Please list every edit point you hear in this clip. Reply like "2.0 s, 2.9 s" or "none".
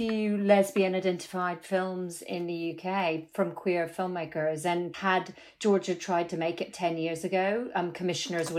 4.9 s